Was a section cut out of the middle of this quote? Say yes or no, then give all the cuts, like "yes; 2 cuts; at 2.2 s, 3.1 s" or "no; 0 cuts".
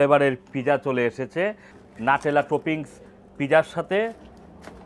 yes; 1 cut; at 1.7 s